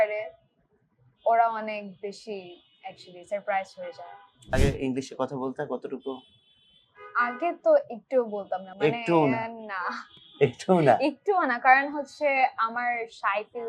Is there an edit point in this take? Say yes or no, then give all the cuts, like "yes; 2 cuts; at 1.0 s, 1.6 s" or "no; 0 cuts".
yes; 1 cut; at 4.5 s